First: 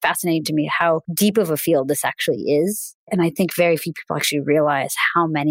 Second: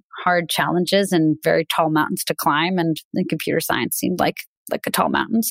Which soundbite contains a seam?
first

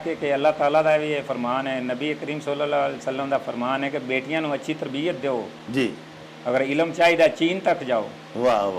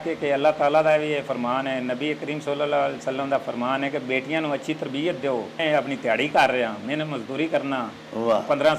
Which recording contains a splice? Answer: second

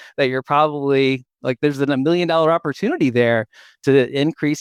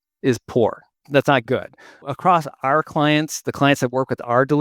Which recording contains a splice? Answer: second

